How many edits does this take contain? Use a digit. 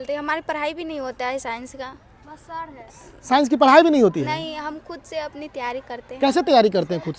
0